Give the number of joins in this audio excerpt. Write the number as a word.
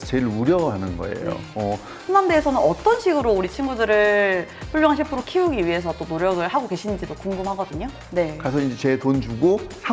two